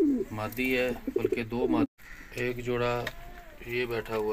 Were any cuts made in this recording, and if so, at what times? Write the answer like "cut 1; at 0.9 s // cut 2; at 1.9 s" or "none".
cut 1; at 1.9 s

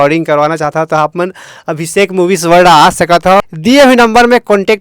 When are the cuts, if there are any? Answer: cut 1; at 3.4 s

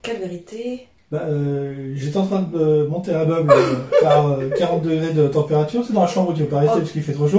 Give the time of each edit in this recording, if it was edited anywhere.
none

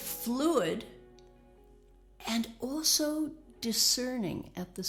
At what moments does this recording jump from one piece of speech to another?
none

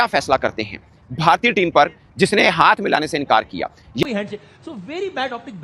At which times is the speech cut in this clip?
cut 1; at 4.0 s

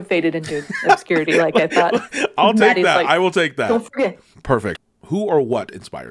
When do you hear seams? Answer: cut 1; at 4.7 s

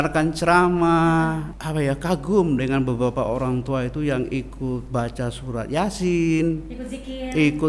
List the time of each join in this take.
cut 1; at 1.5 s

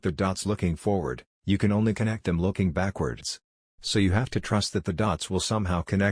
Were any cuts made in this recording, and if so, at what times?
none

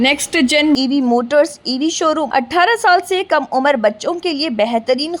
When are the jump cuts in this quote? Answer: cut 1; at 2.2 s

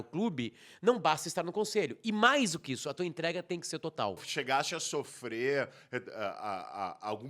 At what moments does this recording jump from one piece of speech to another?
cut 1; at 4.3 s

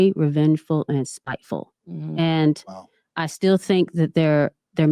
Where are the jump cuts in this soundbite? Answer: none

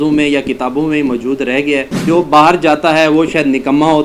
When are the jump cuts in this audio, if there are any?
cut 1; at 2.0 s

